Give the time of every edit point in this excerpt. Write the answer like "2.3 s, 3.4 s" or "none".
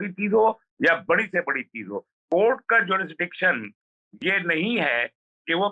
2.1 s